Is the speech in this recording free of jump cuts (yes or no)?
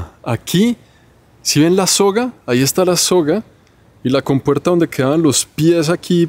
yes